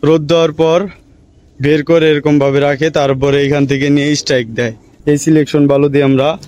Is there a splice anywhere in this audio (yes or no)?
yes